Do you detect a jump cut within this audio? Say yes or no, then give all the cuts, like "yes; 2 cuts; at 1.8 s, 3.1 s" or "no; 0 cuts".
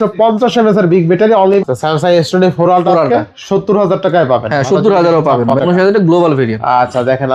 yes; 2 cuts; at 1.6 s, 5.5 s